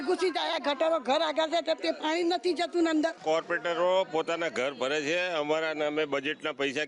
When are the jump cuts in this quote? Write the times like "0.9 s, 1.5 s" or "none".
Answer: 3.2 s